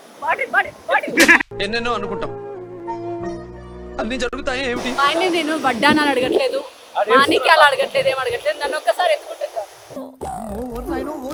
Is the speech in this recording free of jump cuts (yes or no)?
yes